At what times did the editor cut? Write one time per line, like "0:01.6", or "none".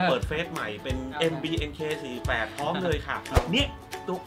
0:03.3